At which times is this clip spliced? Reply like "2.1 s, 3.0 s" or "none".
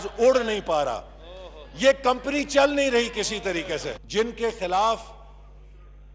3.9 s